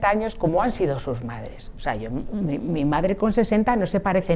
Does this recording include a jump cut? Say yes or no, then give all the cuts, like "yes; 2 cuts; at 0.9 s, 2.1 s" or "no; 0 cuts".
no; 0 cuts